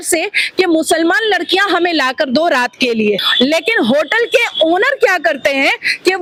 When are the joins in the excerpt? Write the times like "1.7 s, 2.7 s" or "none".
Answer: none